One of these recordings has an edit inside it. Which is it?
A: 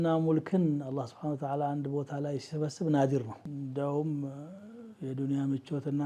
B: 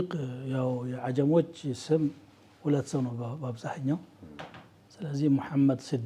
A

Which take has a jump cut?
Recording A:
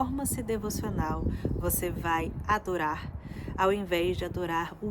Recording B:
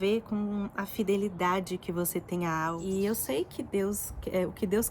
B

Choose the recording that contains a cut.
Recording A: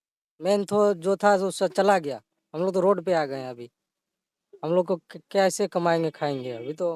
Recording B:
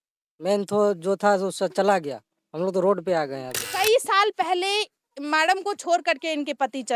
B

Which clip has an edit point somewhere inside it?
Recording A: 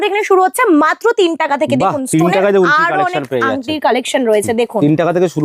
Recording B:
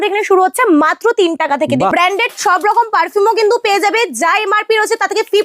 B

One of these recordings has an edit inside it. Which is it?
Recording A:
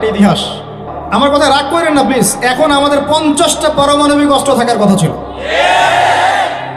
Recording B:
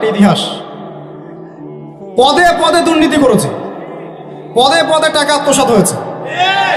A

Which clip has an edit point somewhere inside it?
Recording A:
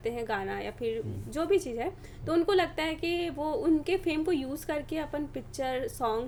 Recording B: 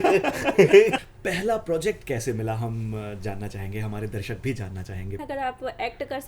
B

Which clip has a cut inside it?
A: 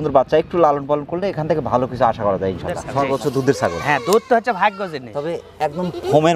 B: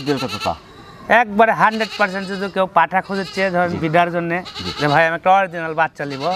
A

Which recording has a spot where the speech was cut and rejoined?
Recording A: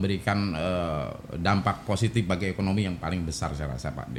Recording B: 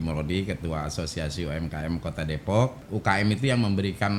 B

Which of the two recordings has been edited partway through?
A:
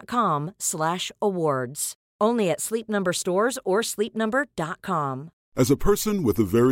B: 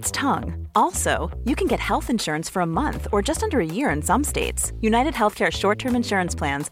A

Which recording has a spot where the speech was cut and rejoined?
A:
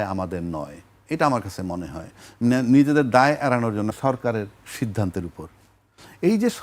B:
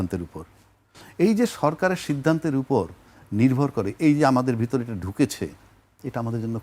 A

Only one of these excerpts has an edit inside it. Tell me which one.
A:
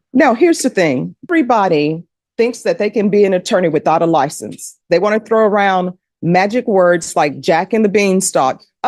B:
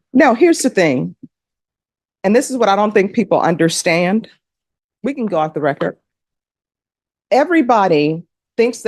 A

